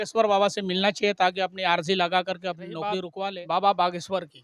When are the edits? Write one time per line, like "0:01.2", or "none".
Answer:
0:03.1